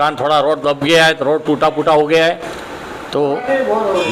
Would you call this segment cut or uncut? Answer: uncut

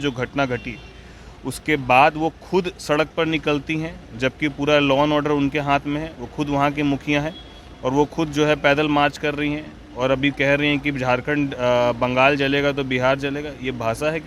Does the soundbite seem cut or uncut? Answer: uncut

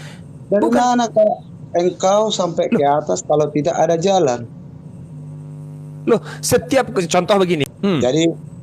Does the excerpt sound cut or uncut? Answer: cut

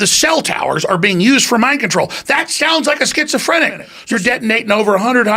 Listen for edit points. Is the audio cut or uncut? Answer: cut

